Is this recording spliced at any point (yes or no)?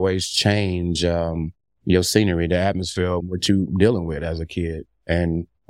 yes